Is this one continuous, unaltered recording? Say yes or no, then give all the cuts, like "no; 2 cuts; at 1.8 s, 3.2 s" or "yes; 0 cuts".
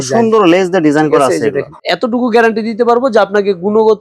no; 1 cut; at 1.7 s